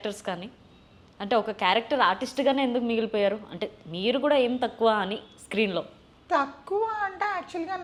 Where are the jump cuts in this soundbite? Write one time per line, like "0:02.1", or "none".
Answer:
none